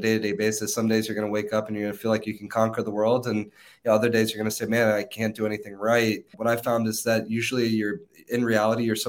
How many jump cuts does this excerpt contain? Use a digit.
1